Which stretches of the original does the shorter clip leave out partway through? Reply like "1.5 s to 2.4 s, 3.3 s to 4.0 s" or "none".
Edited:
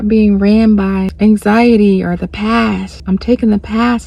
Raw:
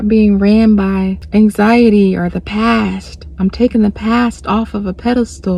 1.1 s to 1.2 s, 3.0 s to 3.2 s